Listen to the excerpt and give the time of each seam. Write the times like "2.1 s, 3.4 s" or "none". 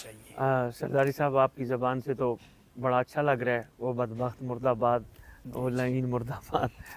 none